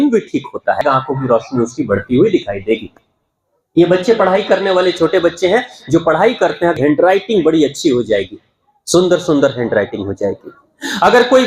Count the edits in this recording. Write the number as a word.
two